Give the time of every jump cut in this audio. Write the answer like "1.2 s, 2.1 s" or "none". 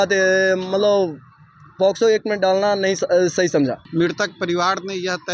3.8 s